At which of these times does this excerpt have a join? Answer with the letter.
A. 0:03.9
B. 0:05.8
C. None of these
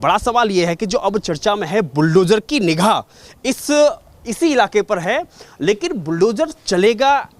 C